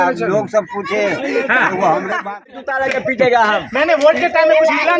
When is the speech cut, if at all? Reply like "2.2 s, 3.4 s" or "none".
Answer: 2.6 s